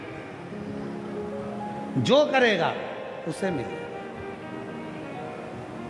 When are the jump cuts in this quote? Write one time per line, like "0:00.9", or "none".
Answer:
none